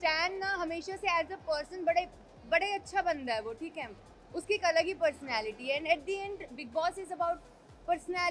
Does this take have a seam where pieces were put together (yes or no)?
no